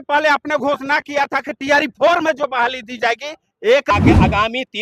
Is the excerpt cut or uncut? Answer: cut